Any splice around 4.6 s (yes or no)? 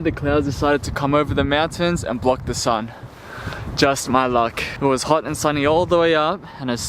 yes